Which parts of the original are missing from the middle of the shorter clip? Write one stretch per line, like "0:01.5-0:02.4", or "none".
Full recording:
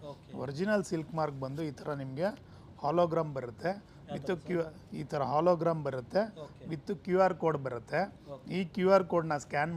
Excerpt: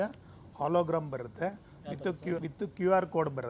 0:04.7-0:06.7